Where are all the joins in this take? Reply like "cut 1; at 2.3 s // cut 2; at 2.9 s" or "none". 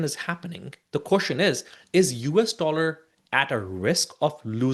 none